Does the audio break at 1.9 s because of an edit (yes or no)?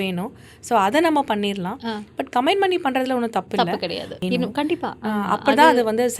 no